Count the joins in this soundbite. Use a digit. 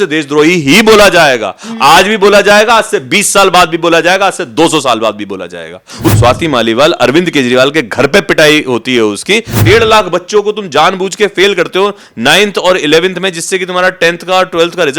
2